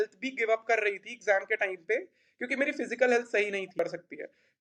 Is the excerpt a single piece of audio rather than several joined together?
yes; 0 cuts

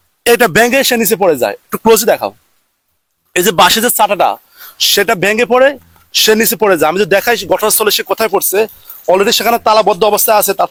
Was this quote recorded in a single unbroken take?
yes; 0 cuts

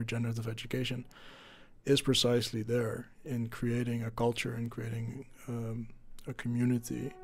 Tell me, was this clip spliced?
no; 0 cuts

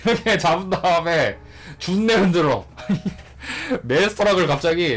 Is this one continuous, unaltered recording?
yes; 0 cuts

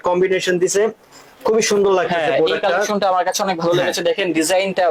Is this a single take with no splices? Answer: yes; 0 cuts

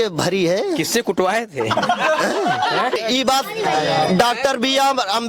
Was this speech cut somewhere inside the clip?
yes; 1 cut; at 3.0 s

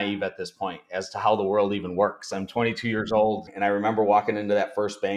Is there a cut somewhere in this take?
yes; 1 cut; at 3.5 s

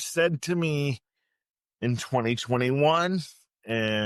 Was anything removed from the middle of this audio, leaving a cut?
no; 0 cuts

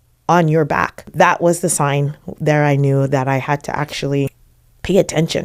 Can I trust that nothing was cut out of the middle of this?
no; 2 cuts; at 1.1 s, 4.4 s

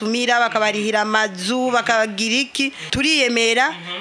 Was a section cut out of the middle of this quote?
yes; 1 cut; at 2.8 s

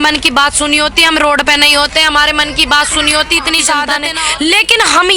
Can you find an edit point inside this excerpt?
yes; 1 cut; at 4.0 s

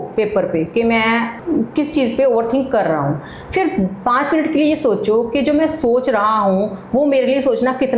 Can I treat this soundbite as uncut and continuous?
no; 1 cut; at 1.4 s

